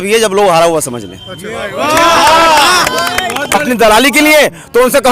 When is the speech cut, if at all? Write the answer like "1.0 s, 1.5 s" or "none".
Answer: 3.5 s